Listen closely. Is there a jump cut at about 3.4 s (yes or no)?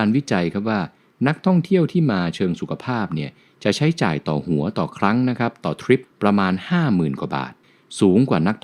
no